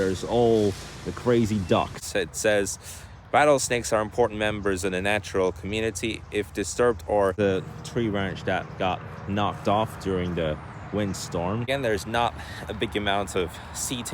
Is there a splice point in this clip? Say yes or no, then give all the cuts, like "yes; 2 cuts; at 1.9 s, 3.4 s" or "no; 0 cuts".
yes; 3 cuts; at 2.0 s, 7.3 s, 11.7 s